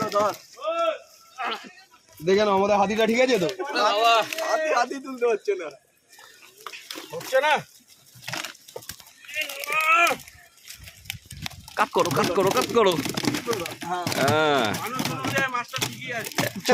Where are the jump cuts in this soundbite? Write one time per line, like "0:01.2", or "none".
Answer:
none